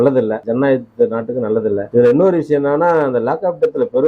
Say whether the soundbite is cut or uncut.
cut